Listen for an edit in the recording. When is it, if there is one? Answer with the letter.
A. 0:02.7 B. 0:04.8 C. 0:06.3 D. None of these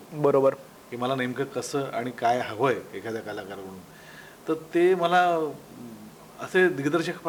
D